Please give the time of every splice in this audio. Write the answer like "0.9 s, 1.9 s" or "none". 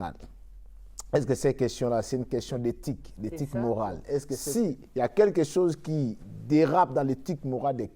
4.4 s